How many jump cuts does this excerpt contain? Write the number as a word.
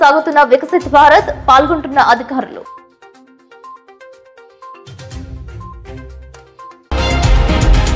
one